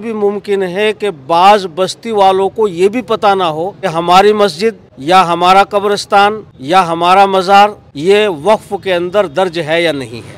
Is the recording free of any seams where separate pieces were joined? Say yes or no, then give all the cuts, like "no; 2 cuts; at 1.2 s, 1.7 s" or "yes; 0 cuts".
no; 4 cuts; at 3.9 s, 4.9 s, 6.5 s, 7.9 s